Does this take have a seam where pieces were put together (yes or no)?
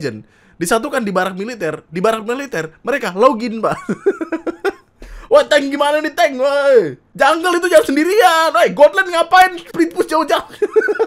yes